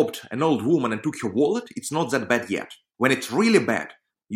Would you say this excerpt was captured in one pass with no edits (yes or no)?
no